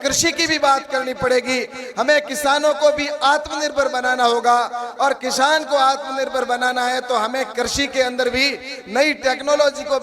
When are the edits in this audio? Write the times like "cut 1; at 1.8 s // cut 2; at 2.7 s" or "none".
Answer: none